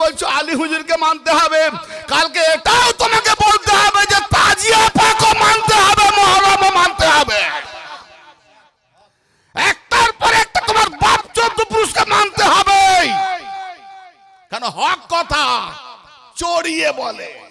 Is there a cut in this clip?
no; 0 cuts

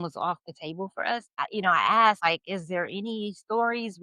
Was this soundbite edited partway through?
yes; 1 cut; at 1.4 s

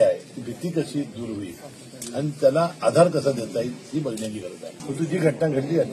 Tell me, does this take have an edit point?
yes; 1 cut; at 4.7 s

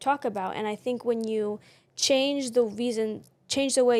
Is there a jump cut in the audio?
no; 0 cuts

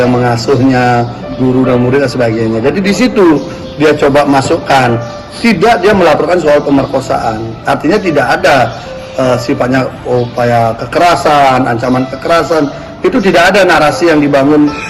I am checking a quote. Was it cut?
no; 0 cuts

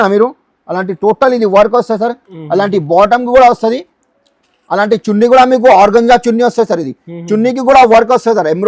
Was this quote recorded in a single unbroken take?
yes; 0 cuts

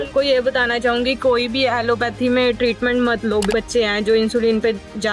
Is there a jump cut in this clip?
yes; 1 cut; at 3.5 s

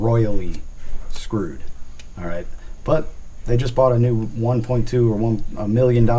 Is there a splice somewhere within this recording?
no; 0 cuts

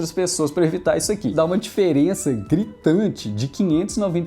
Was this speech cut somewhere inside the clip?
yes; 1 cut; at 1.3 s

